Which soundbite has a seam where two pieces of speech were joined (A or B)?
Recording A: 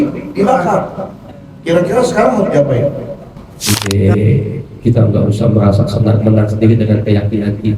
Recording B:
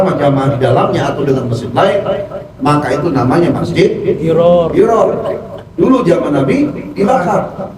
A